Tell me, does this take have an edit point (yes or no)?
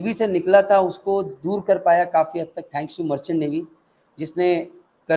no